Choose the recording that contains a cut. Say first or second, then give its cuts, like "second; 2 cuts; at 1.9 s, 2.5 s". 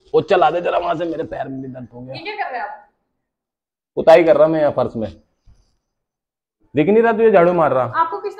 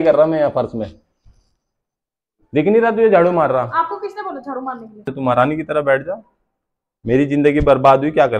second; 1 cut; at 5.1 s